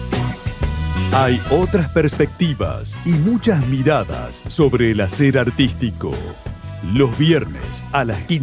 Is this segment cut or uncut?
cut